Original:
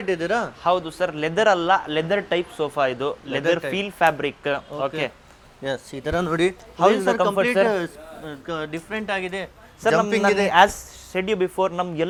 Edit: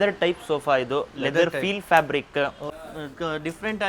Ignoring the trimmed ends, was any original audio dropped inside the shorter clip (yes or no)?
yes